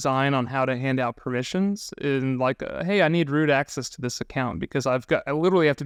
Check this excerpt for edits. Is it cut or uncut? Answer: uncut